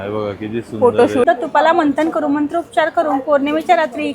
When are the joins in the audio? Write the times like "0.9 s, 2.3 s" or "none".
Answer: 1.2 s